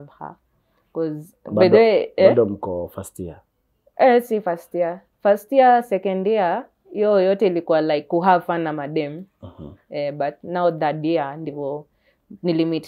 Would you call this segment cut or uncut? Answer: uncut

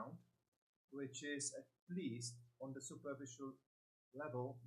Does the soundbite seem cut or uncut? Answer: uncut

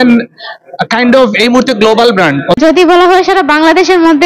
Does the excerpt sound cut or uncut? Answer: cut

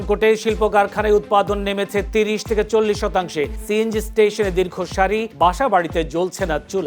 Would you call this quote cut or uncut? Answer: uncut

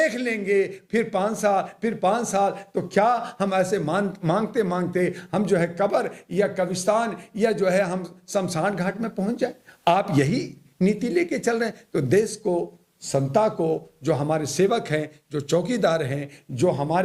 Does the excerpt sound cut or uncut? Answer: uncut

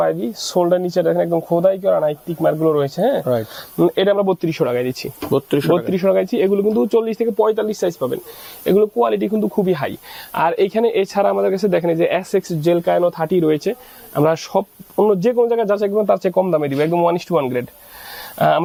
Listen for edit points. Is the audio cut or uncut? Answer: uncut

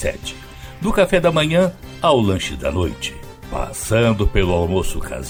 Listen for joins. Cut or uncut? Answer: uncut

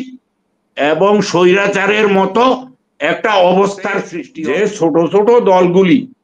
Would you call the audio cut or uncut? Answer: cut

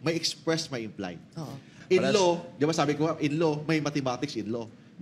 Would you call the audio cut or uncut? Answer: cut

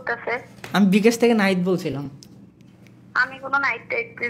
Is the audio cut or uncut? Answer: uncut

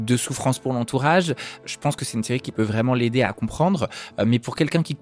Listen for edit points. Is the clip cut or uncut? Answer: uncut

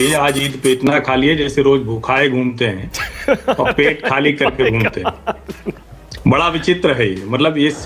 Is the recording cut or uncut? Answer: uncut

